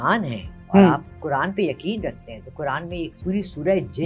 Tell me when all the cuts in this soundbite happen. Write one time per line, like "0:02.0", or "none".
0:03.2